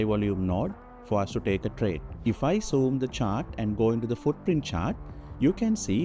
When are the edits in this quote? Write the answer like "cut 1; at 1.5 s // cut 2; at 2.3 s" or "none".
cut 1; at 2.1 s